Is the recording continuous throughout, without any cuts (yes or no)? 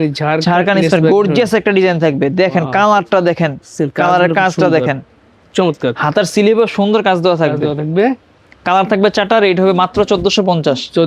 yes